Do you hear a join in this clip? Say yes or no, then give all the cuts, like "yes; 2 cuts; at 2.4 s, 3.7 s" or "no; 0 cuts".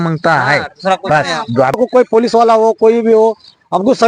yes; 1 cut; at 1.8 s